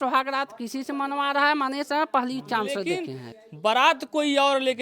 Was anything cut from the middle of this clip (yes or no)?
yes